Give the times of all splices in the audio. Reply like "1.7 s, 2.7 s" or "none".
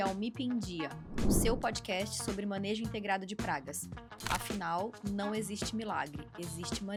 none

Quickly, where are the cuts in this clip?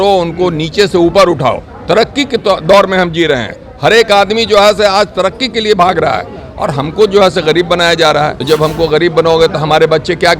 8.4 s

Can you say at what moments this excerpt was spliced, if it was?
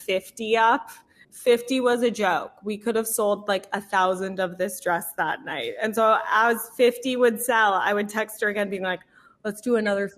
none

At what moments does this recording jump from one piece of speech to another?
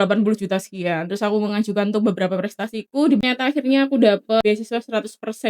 3.2 s, 4.4 s

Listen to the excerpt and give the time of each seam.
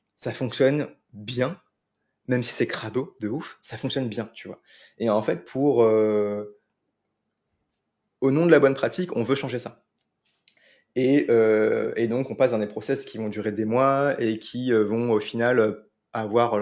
none

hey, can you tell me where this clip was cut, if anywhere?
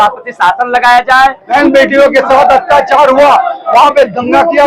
1.4 s

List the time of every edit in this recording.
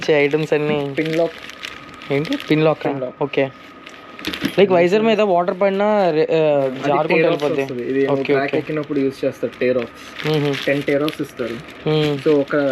none

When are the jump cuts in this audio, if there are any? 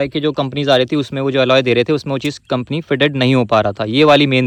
none

